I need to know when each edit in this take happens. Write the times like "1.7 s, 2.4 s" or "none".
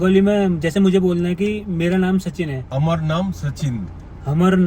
2.6 s